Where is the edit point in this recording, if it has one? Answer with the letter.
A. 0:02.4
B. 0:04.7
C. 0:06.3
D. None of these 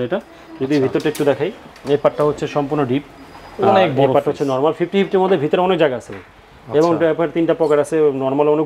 D